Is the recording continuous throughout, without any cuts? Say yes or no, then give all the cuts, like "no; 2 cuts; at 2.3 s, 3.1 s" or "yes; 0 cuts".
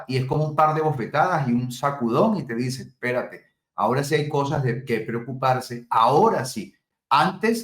yes; 0 cuts